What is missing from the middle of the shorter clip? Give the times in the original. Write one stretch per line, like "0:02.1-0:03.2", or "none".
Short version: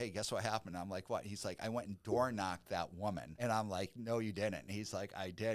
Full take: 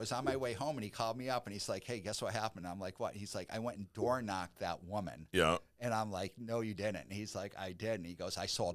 0:05.2-0:05.7